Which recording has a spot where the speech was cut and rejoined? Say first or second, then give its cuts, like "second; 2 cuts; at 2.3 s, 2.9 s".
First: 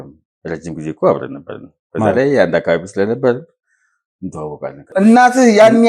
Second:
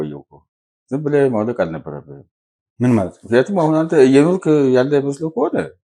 first; 1 cut; at 4.9 s